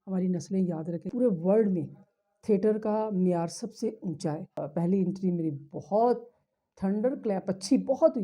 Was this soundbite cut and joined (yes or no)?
yes